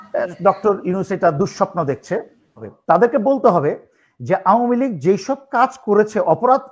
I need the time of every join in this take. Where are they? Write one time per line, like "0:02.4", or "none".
0:02.6